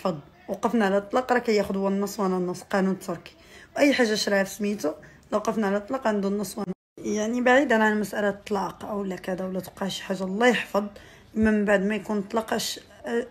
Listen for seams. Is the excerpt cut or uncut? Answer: uncut